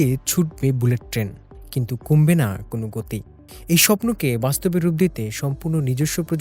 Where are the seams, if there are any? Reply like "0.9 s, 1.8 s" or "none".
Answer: none